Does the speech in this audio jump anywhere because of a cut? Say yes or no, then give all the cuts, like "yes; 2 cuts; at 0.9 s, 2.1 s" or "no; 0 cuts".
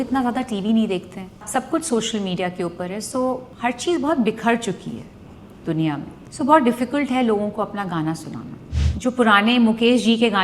yes; 4 cuts; at 1.4 s, 3.5 s, 6.2 s, 8.7 s